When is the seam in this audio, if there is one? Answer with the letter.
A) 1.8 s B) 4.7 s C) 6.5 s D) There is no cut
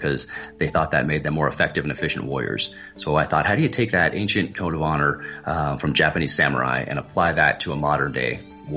D